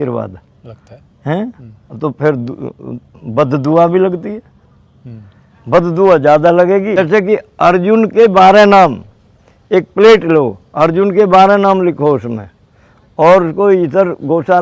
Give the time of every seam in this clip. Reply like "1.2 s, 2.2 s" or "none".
7.0 s